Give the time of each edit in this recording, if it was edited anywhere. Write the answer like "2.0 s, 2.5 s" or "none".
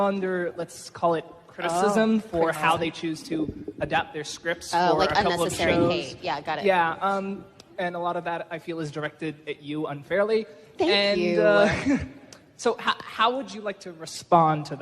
10.5 s

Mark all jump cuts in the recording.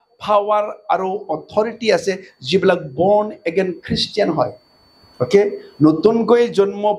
none

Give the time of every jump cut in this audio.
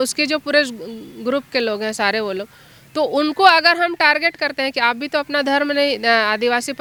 none

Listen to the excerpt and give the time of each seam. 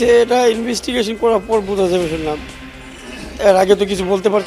none

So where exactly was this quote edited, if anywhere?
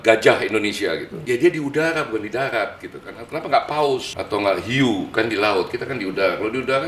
1.1 s, 4.1 s

